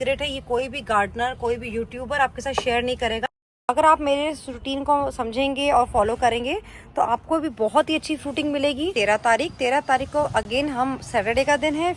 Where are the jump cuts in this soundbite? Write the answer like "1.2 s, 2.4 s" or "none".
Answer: 3.7 s, 8.9 s